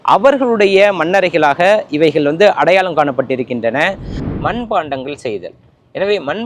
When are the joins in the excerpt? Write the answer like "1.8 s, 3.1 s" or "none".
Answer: 4.2 s